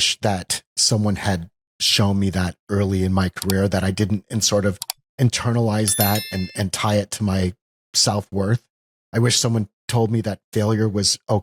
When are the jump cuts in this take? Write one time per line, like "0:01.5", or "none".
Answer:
none